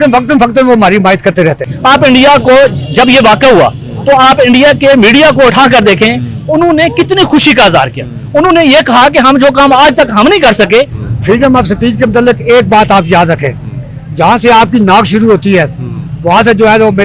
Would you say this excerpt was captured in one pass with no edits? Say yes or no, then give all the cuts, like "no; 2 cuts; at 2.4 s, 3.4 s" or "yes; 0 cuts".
no; 2 cuts; at 1.7 s, 11.0 s